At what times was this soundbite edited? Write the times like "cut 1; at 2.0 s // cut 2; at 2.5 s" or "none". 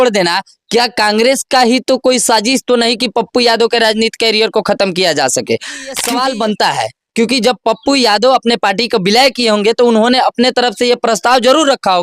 cut 1; at 6.0 s